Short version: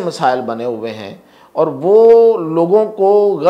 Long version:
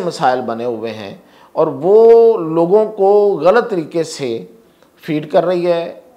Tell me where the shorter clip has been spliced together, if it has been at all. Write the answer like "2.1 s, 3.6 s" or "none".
none